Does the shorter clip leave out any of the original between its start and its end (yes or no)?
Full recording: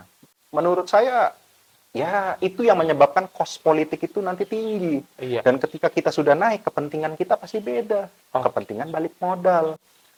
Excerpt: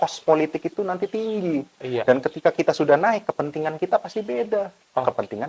no